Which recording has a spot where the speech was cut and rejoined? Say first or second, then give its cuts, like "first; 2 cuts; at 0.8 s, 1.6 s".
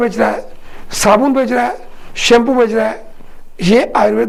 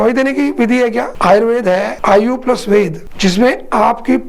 second; 3 cuts; at 1.1 s, 1.9 s, 3.0 s